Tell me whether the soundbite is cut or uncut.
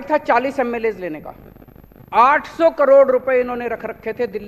uncut